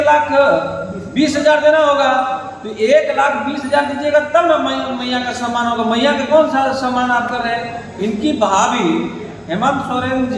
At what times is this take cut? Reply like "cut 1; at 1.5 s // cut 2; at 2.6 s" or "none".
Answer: none

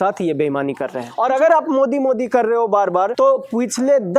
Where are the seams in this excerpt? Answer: cut 1; at 1.0 s // cut 2; at 3.1 s

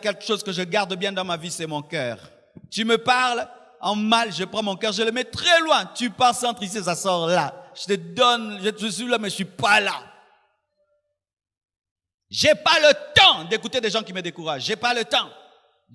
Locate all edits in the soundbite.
none

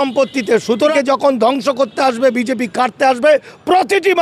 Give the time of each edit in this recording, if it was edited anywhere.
cut 1; at 0.9 s

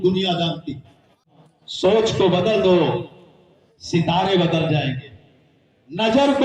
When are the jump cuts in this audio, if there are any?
cut 1; at 1.3 s

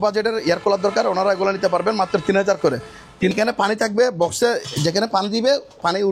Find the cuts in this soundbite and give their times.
cut 1; at 3.3 s

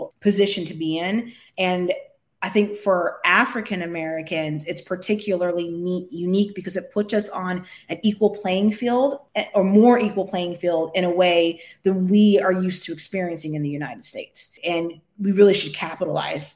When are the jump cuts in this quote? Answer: none

